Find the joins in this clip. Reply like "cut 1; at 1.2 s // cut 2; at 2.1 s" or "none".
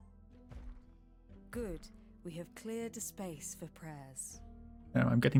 none